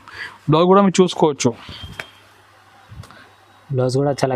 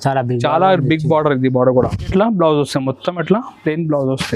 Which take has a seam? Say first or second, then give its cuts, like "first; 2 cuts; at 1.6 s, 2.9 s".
second; 1 cut; at 2.0 s